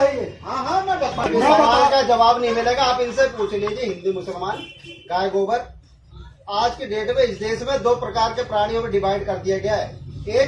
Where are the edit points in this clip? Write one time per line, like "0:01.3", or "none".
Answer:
0:01.3